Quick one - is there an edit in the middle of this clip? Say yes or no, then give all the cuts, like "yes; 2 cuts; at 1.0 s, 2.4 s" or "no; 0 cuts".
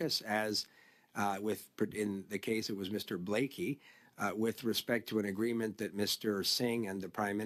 no; 0 cuts